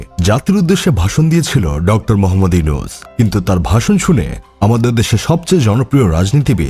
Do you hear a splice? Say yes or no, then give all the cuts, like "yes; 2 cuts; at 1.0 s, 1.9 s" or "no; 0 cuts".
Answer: no; 0 cuts